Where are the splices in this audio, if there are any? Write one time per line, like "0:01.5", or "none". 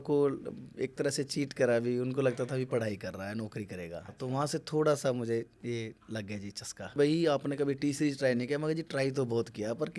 0:04.1
0:06.9